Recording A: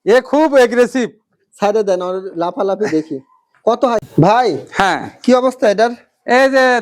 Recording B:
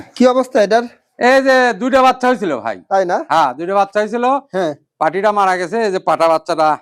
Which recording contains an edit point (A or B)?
A